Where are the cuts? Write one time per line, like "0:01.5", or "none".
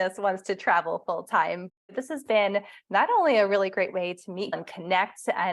0:01.8
0:04.6